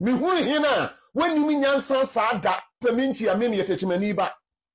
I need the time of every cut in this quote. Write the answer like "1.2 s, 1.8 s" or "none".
2.8 s

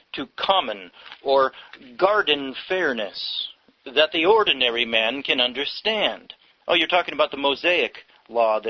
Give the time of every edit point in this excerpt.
none

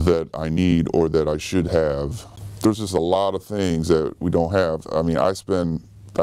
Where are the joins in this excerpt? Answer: 2.3 s

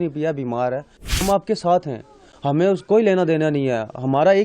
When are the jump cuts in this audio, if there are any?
1.2 s

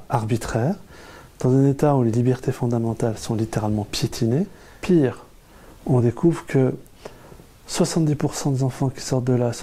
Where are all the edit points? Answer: 4.7 s

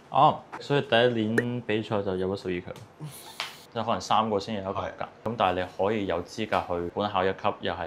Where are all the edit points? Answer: 3.6 s, 5.2 s

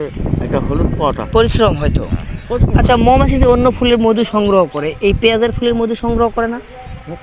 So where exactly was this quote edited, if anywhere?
1.2 s

